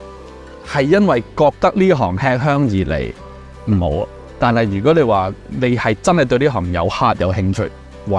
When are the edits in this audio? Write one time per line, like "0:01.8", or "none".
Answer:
none